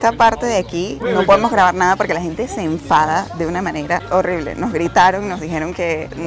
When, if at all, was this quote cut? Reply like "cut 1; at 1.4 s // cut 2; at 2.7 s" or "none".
none